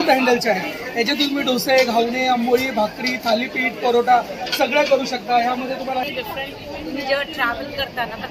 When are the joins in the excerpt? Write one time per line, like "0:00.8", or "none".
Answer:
0:06.1